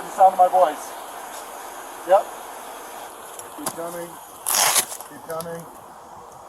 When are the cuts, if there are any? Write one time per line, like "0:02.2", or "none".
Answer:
none